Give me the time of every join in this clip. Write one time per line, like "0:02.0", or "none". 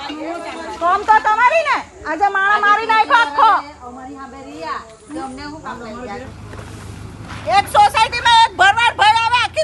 0:06.2